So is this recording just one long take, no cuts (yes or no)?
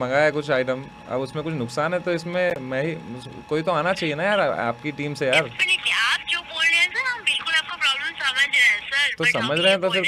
yes